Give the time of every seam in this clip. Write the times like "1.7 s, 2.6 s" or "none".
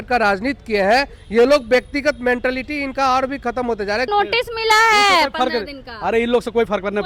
4.1 s